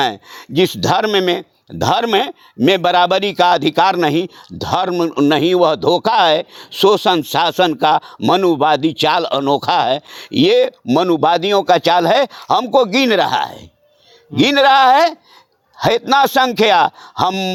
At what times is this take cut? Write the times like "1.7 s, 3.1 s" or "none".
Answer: none